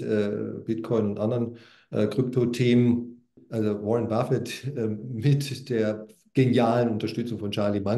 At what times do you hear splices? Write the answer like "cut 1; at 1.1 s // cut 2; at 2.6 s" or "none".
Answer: cut 1; at 3.4 s